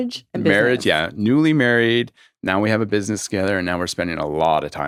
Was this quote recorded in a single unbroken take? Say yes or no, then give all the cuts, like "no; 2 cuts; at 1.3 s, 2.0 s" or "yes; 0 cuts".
yes; 0 cuts